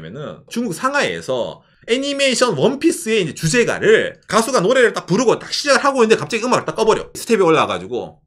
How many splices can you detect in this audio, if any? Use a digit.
2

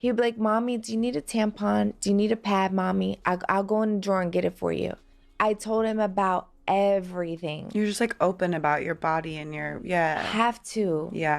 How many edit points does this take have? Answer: 1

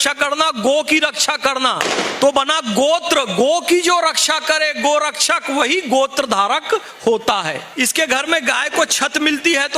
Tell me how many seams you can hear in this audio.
1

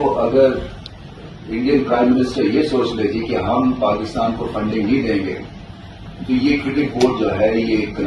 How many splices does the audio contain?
0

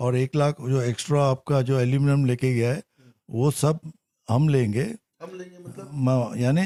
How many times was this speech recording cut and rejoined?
0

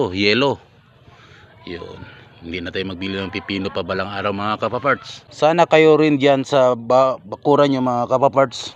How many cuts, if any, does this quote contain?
0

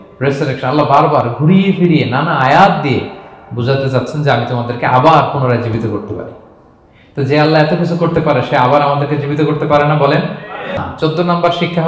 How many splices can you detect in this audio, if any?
1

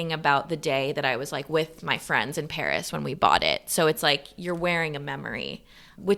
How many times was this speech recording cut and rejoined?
0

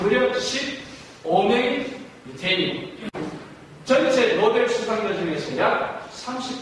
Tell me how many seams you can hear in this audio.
1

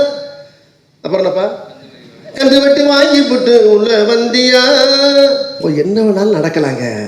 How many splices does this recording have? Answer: 1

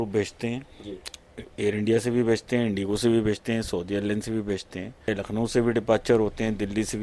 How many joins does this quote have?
1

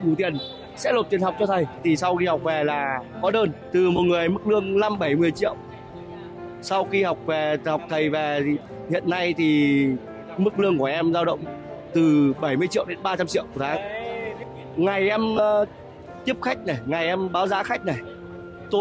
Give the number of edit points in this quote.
3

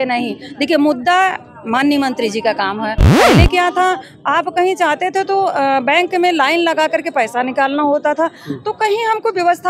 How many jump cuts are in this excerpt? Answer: 1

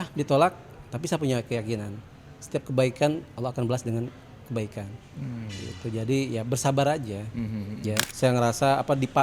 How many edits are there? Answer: 1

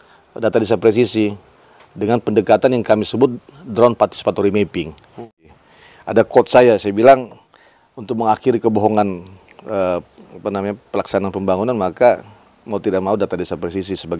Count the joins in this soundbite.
1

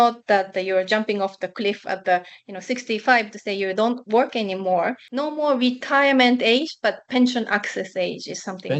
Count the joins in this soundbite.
1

